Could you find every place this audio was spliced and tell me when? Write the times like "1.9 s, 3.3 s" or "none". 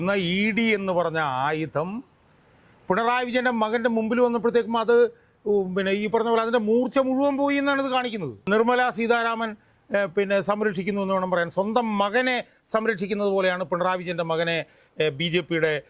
8.5 s